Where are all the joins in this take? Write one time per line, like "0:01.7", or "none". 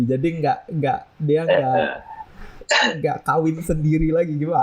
none